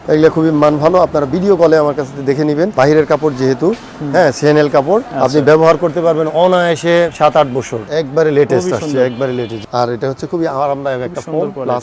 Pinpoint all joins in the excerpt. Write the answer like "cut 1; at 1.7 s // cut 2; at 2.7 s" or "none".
cut 1; at 2.7 s // cut 2; at 5.1 s // cut 3; at 7.8 s // cut 4; at 9.6 s